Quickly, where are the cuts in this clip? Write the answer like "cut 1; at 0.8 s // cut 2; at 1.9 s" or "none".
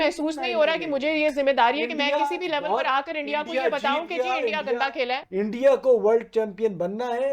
cut 1; at 5.2 s